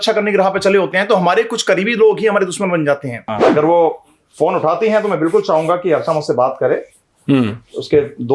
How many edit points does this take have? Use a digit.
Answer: 1